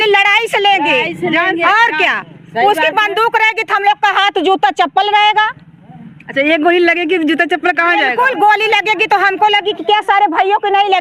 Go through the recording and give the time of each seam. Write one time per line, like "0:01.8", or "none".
none